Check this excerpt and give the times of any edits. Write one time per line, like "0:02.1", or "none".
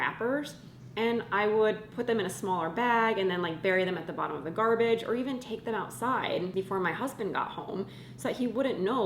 0:06.5